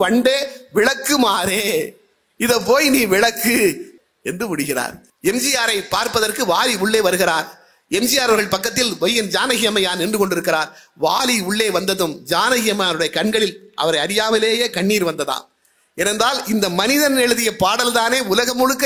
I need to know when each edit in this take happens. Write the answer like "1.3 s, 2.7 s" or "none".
3.9 s, 5.0 s

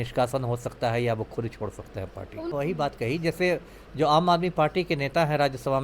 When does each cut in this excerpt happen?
2.5 s

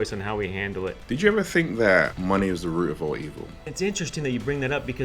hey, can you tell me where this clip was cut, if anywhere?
1.0 s, 2.1 s, 3.6 s

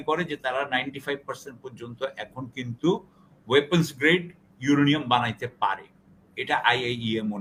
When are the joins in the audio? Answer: none

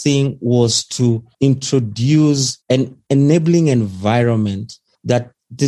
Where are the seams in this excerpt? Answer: none

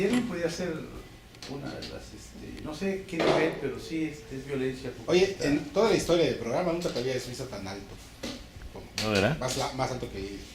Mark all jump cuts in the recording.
5.9 s

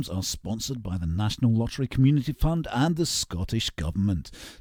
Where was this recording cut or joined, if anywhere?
none

